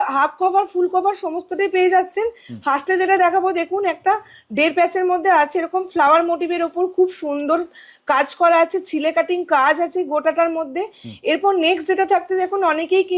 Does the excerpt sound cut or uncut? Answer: uncut